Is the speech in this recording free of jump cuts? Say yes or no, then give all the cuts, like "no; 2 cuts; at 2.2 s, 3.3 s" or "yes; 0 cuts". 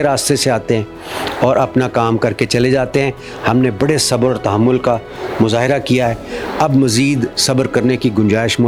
yes; 0 cuts